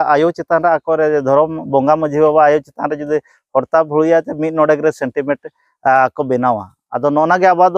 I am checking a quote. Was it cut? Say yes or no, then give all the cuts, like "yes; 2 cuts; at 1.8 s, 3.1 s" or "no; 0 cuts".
no; 0 cuts